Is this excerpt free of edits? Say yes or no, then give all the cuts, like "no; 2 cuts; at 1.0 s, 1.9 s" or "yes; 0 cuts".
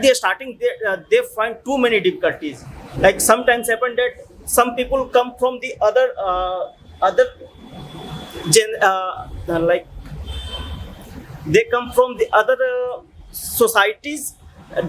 yes; 0 cuts